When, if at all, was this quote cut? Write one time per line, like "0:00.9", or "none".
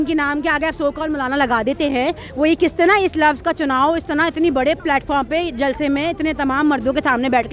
none